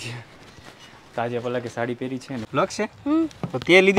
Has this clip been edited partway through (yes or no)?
yes